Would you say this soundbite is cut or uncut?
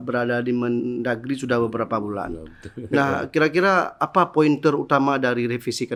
uncut